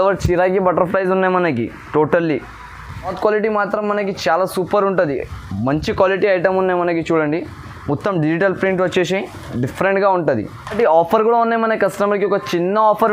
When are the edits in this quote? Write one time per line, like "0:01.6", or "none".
0:03.2
0:10.8